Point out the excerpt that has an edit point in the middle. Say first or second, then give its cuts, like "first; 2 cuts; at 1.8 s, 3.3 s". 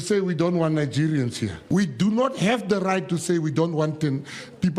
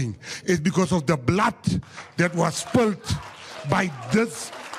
first; 1 cut; at 1.5 s